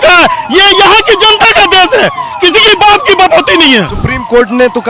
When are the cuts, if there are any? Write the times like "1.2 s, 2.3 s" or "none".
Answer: 3.9 s